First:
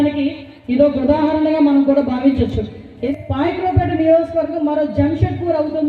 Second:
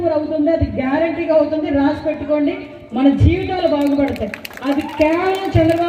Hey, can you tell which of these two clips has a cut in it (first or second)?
first